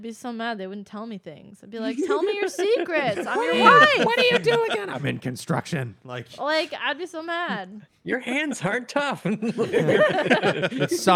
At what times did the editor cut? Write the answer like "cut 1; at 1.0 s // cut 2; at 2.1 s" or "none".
none